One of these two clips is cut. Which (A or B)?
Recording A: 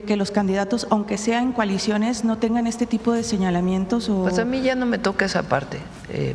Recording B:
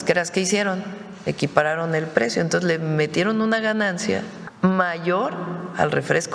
B